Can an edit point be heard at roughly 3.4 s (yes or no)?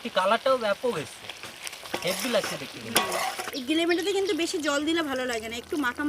yes